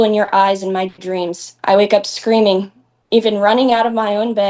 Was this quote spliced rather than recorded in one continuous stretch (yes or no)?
yes